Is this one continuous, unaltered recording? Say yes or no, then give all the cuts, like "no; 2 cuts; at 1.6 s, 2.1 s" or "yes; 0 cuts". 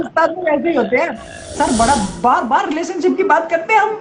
no; 1 cut; at 1.6 s